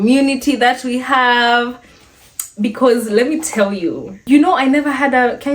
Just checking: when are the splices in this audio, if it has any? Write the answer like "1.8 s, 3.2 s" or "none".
4.1 s